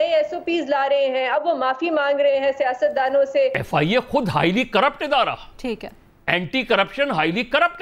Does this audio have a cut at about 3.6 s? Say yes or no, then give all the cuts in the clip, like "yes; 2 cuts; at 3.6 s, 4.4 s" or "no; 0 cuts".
yes; 1 cut; at 3.6 s